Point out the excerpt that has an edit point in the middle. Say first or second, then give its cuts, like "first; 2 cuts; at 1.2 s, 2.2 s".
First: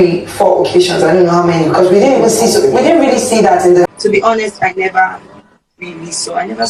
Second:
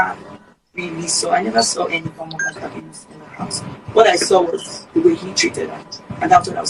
first; 1 cut; at 3.9 s